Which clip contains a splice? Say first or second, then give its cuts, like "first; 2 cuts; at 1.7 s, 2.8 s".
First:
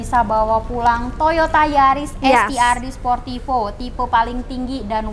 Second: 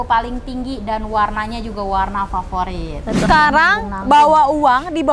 second; 1 cut; at 3.3 s